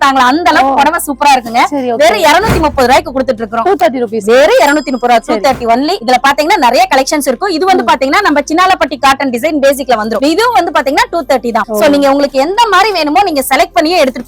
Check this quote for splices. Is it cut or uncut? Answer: uncut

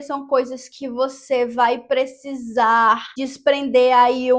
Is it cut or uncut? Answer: uncut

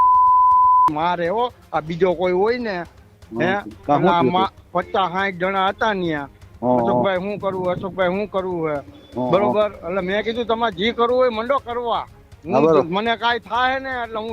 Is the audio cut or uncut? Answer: uncut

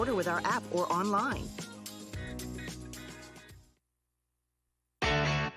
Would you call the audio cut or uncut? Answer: cut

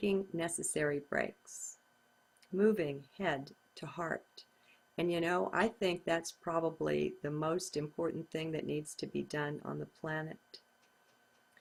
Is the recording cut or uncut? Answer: uncut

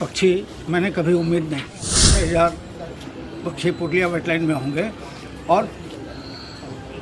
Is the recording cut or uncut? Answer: cut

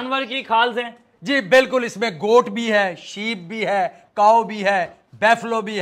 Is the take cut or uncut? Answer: uncut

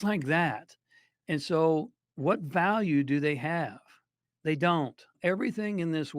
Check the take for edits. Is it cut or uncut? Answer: cut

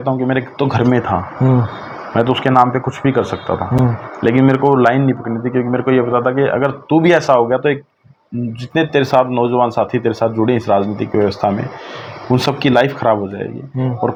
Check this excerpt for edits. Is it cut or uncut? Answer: uncut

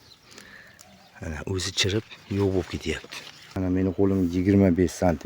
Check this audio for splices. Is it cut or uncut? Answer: cut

